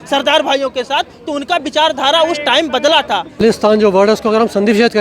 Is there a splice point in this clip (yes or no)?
yes